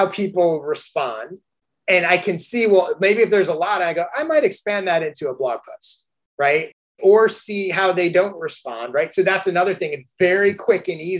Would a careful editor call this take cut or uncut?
cut